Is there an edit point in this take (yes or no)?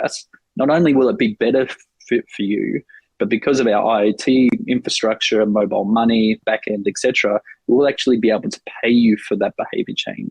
yes